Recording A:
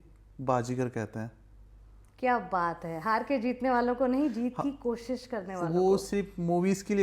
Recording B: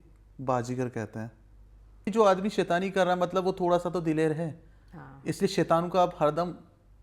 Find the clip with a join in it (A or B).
B